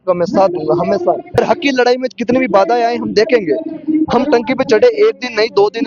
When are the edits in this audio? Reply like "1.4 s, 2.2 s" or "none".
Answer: 1.4 s

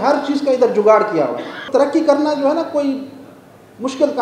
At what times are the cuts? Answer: 1.6 s

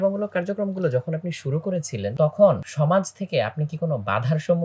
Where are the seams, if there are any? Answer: 2.1 s, 2.7 s

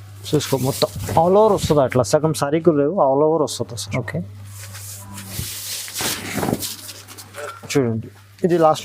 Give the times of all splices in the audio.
none

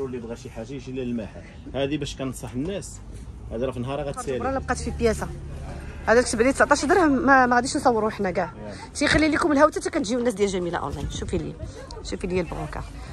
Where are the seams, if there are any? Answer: 4.4 s

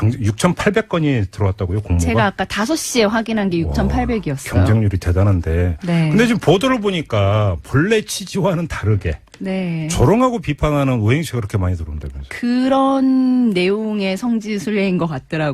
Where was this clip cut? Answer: 6.0 s

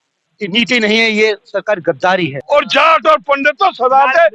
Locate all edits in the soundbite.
2.4 s

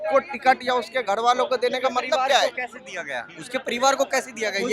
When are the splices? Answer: none

